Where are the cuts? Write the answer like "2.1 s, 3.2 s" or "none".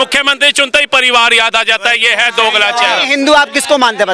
none

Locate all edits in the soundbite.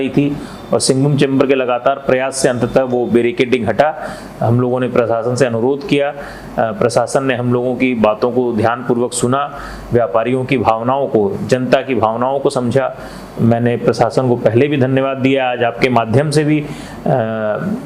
none

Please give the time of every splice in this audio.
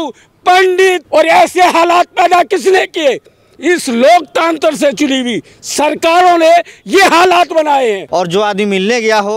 1.0 s, 8.0 s

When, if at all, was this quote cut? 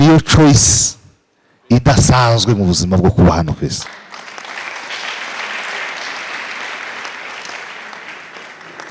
none

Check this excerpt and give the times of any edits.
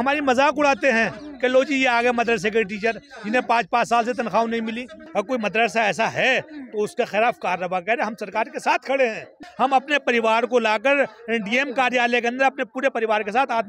5.0 s, 9.4 s

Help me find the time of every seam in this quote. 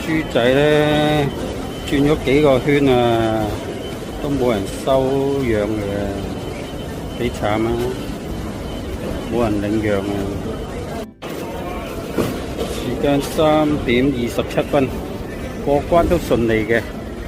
none

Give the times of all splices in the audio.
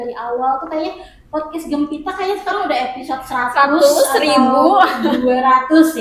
none

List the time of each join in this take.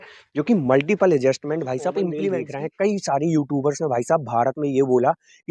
2.5 s

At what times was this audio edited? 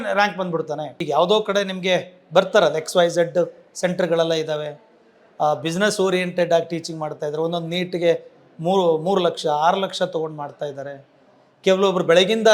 0.9 s

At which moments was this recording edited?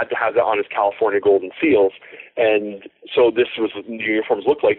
none

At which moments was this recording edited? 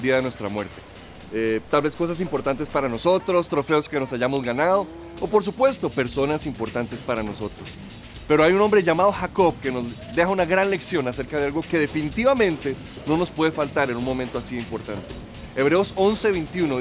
none

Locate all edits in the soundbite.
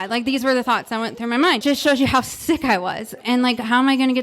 1.6 s, 3.2 s

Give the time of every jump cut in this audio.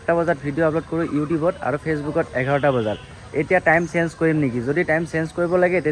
none

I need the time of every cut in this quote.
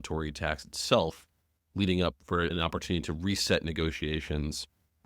2.5 s

